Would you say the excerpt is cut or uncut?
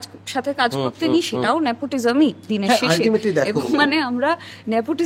uncut